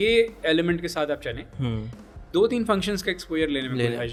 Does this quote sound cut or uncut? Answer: uncut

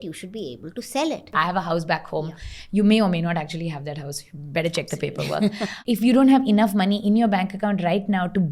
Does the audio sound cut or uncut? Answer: cut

